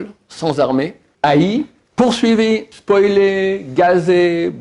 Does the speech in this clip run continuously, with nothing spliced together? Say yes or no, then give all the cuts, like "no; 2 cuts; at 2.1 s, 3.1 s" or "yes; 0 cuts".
no; 3 cuts; at 1.0 s, 1.8 s, 2.7 s